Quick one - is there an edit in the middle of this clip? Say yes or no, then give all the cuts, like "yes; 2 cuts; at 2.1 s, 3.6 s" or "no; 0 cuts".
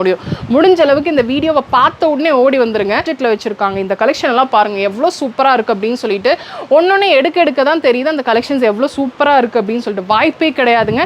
yes; 1 cut; at 3.1 s